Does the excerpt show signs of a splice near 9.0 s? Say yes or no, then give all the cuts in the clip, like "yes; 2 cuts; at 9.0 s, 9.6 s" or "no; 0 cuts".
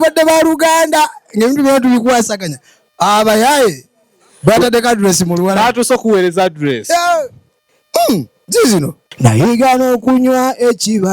yes; 1 cut; at 9.0 s